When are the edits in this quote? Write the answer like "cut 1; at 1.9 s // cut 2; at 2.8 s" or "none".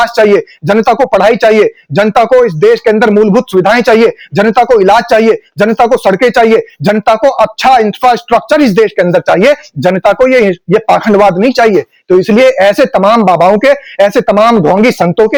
none